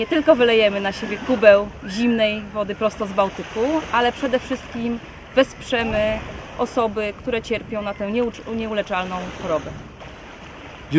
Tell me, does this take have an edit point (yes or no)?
yes